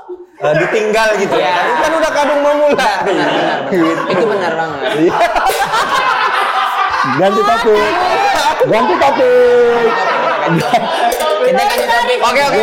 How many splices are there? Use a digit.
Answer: 0